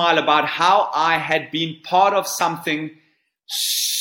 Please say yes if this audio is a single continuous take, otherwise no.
yes